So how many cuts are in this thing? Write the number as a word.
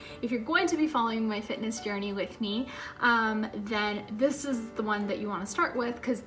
zero